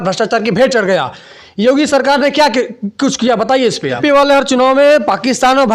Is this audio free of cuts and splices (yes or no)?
no